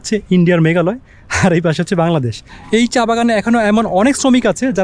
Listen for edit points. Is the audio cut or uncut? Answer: cut